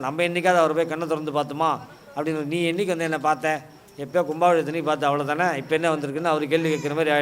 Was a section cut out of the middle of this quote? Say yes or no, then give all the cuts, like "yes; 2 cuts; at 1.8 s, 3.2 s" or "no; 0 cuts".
no; 0 cuts